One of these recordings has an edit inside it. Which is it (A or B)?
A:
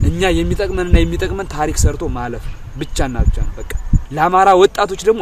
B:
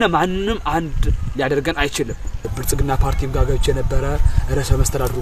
B